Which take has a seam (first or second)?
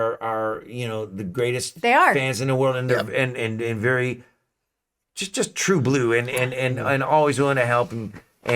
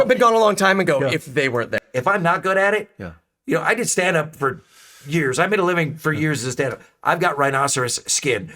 second